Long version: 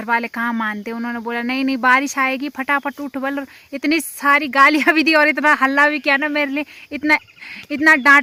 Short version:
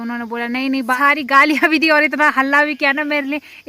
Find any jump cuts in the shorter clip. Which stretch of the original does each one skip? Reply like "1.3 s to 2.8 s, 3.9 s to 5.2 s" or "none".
1.9 s to 4.2 s